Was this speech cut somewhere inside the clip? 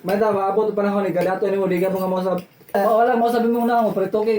yes; 1 cut; at 2.7 s

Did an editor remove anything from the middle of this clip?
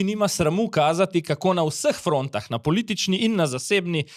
no; 0 cuts

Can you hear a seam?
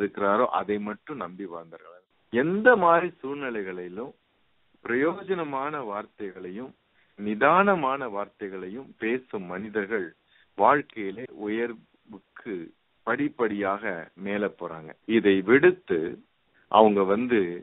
yes; 1 cut; at 1.7 s

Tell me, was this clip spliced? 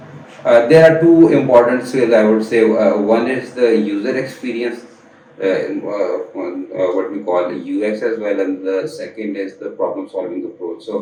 no; 0 cuts

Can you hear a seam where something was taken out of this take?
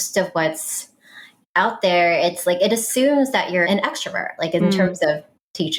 no; 0 cuts

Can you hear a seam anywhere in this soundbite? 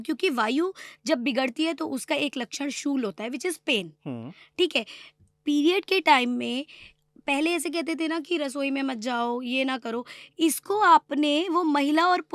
no; 0 cuts

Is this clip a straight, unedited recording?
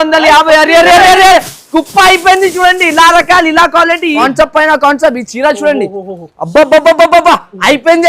no; 1 cut; at 4.2 s

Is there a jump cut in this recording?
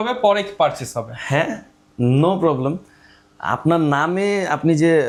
no; 0 cuts

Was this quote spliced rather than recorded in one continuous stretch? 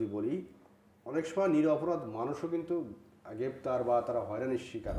no; 0 cuts

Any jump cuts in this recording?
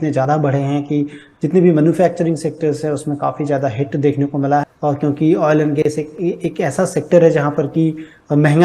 yes; 1 cut; at 4.7 s

